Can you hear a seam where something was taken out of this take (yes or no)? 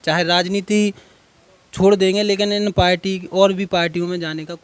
no